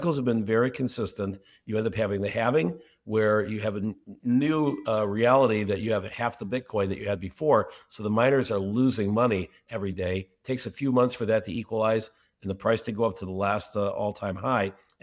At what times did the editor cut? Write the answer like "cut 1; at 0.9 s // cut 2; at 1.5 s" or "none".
none